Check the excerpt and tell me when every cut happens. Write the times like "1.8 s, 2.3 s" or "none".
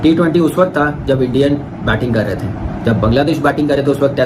none